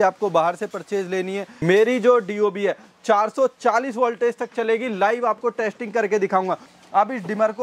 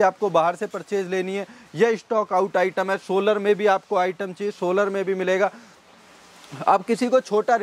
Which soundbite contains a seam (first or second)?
first